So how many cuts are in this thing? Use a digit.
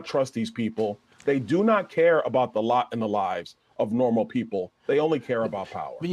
0